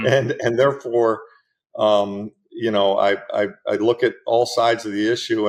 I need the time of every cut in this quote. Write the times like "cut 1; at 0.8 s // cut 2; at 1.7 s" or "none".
none